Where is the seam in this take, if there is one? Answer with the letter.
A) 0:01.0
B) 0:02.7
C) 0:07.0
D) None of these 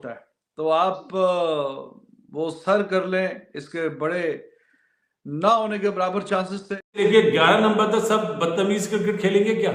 C